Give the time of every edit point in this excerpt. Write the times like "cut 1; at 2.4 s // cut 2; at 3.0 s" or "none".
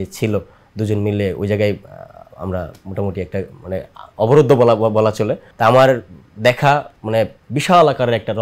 cut 1; at 5.4 s